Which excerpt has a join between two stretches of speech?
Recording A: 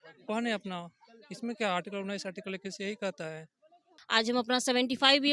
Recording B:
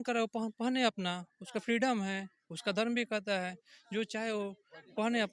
A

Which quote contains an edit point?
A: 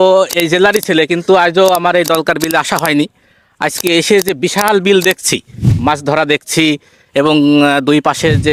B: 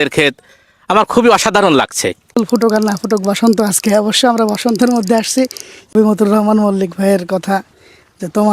B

